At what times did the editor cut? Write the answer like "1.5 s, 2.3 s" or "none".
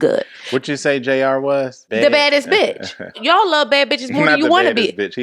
1.8 s, 3.2 s